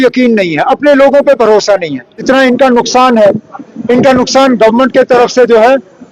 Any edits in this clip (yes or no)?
yes